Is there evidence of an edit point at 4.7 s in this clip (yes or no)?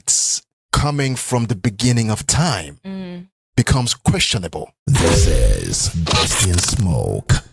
yes